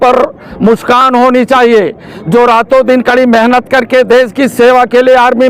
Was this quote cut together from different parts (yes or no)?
no